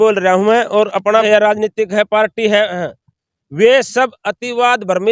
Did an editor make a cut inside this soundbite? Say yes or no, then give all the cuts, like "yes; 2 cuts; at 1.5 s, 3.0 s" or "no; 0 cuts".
yes; 1 cut; at 1.2 s